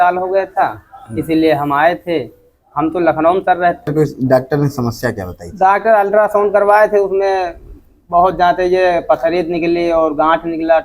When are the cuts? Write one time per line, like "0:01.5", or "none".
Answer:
0:03.9